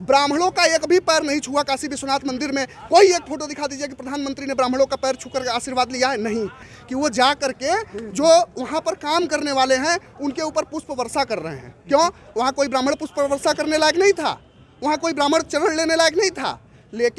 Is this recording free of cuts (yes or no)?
no